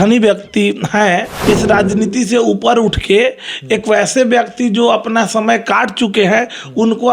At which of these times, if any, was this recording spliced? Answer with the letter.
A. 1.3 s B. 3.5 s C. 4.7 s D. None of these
A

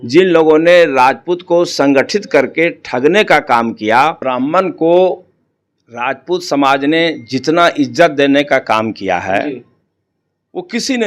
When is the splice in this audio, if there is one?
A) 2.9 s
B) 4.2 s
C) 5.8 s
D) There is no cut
B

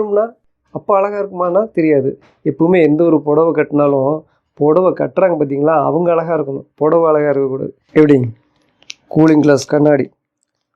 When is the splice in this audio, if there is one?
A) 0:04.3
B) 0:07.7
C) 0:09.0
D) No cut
B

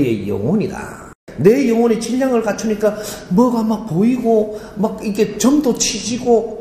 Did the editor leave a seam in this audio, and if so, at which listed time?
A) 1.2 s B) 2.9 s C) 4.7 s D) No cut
A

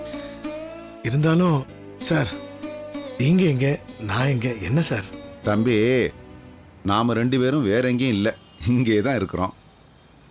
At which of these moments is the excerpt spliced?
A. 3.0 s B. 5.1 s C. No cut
C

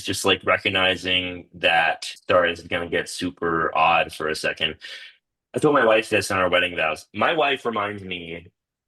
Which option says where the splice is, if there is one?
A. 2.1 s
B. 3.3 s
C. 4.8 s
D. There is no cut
A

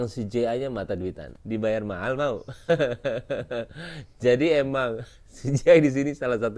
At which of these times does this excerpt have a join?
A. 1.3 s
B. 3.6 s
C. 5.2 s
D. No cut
A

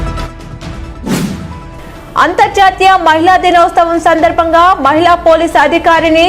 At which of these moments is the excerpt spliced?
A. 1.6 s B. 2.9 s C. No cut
A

